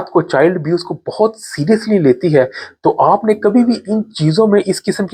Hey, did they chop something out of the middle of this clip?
no; 0 cuts

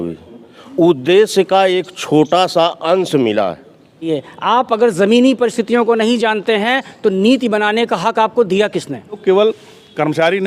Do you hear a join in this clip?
yes; 2 cuts; at 4.1 s, 9.2 s

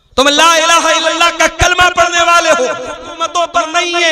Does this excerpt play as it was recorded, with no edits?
no; 1 cut; at 3.1 s

